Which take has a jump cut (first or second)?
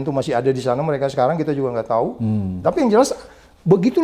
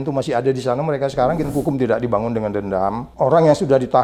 second